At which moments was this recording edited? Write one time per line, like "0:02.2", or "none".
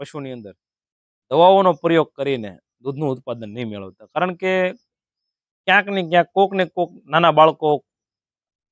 none